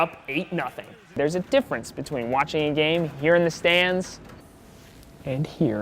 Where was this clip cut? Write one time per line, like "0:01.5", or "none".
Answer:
0:01.2